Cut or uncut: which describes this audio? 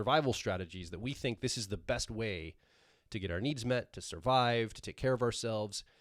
uncut